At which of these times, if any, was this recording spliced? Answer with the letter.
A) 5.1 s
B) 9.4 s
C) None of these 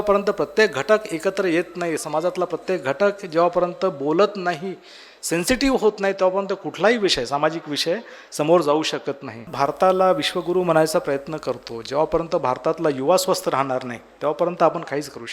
B